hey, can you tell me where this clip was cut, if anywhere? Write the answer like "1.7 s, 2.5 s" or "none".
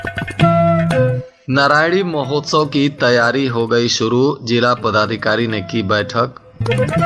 1.3 s